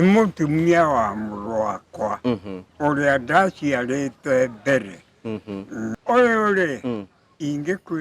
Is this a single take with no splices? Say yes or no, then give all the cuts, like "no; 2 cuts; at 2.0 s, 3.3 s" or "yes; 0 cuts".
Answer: no; 1 cut; at 5.9 s